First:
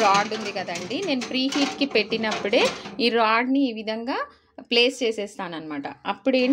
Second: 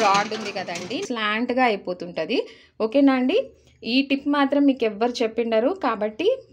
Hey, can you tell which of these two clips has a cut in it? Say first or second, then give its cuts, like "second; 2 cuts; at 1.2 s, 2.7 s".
second; 1 cut; at 1.0 s